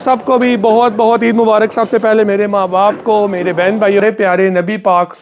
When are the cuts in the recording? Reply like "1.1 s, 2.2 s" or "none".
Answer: 4.0 s